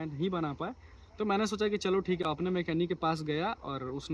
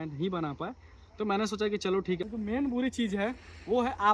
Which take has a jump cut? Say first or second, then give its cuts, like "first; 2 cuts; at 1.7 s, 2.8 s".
second; 1 cut; at 2.7 s